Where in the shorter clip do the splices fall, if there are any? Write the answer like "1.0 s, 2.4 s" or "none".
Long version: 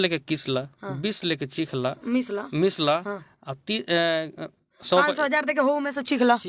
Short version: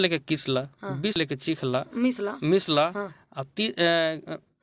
1.1 s